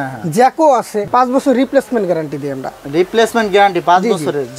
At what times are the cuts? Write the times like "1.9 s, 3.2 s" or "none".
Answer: 1.1 s